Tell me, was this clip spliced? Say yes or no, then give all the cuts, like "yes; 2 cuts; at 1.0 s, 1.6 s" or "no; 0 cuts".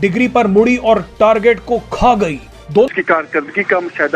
yes; 1 cut; at 2.9 s